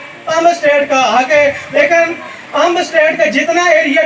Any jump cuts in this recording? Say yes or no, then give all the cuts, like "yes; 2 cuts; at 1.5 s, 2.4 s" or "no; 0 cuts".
yes; 1 cut; at 1.8 s